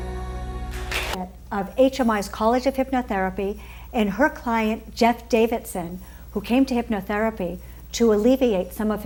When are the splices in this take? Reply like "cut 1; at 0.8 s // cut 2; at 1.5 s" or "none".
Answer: none